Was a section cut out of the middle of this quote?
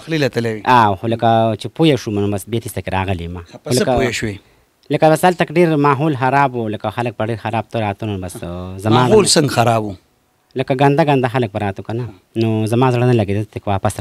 no; 0 cuts

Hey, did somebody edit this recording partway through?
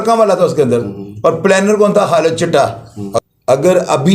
yes; 1 cut; at 3.0 s

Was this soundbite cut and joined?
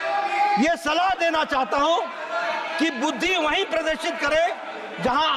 no; 0 cuts

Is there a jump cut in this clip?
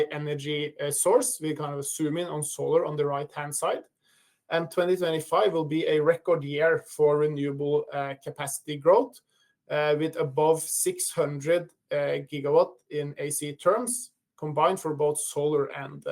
no; 0 cuts

